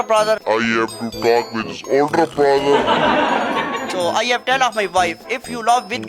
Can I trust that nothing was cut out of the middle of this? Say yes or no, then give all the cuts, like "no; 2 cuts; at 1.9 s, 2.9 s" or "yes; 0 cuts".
no; 1 cut; at 3.9 s